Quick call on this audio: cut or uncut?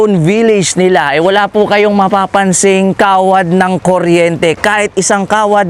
uncut